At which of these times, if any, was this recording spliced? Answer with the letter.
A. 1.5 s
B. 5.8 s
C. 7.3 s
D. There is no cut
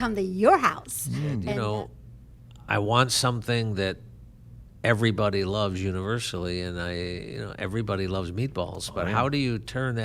A